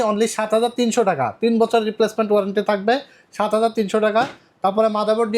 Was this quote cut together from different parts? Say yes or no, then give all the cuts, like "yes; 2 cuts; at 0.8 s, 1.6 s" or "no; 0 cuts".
no; 0 cuts